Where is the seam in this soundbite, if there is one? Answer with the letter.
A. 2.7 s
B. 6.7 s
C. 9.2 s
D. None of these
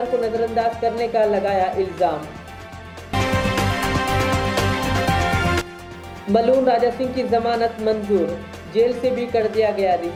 D